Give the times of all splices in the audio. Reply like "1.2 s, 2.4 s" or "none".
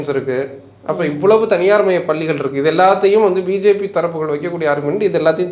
none